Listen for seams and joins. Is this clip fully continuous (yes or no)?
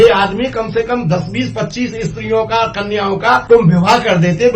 no